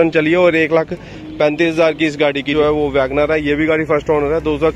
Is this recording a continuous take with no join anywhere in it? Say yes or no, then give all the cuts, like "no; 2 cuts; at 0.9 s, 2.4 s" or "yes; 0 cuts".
no; 1 cut; at 2.5 s